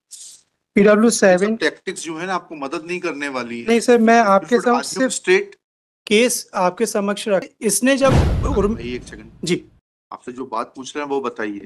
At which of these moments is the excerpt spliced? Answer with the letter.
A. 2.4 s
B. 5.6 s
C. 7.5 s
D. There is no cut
C